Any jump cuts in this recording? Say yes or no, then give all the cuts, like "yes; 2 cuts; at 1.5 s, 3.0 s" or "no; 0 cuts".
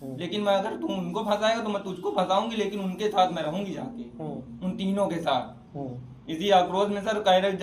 no; 0 cuts